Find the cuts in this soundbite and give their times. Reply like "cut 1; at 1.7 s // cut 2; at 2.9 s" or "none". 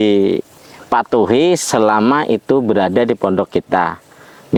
none